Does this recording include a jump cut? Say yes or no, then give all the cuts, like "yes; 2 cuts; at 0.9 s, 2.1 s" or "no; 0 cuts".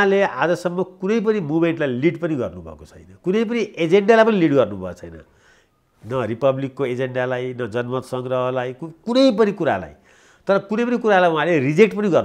no; 0 cuts